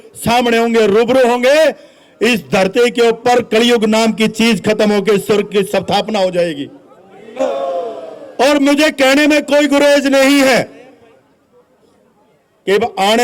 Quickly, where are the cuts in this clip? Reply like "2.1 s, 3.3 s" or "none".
7.4 s